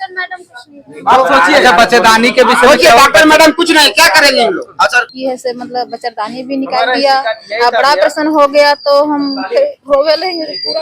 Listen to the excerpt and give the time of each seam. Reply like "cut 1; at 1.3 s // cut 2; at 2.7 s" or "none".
cut 1; at 5.1 s